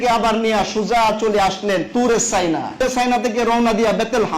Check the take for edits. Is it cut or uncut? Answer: cut